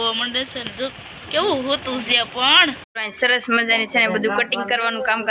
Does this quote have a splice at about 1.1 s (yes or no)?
no